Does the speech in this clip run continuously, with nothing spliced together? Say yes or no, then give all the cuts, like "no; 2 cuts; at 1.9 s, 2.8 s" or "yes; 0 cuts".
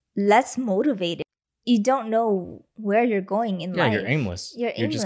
no; 1 cut; at 1.2 s